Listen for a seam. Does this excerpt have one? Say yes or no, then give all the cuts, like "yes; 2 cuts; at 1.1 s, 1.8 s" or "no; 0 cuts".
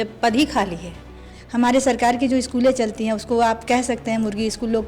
yes; 1 cut; at 1.3 s